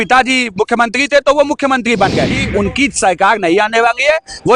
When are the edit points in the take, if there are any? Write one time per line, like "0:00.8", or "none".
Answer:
0:02.3